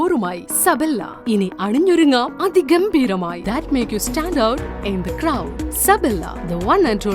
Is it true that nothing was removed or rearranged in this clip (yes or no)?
no